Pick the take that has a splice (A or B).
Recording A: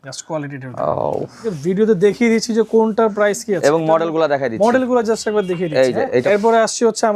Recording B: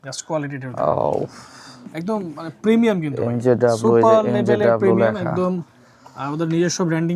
A